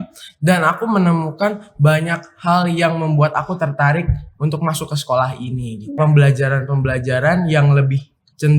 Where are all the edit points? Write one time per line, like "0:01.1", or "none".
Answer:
0:06.0